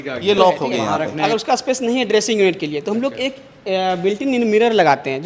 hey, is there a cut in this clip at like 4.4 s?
no; 1 cut; at 1.2 s

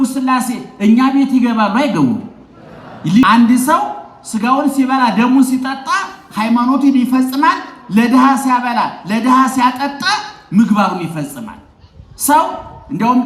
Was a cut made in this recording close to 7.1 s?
no; 1 cut; at 3.2 s

